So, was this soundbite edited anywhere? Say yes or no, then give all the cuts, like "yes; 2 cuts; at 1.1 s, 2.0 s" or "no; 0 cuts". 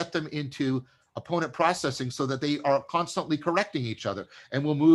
no; 0 cuts